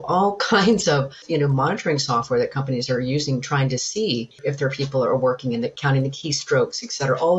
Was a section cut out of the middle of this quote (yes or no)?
yes